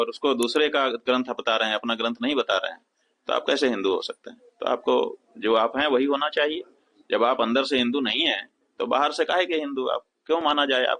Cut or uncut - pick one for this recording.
uncut